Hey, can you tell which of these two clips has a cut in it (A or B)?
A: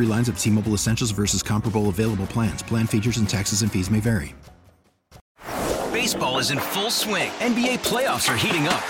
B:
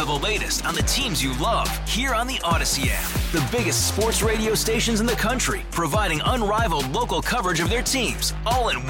A